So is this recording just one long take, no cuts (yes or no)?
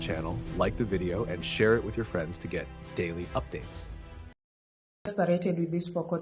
no